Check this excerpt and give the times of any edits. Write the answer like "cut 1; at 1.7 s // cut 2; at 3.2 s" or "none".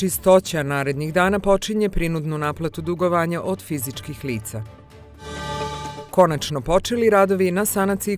none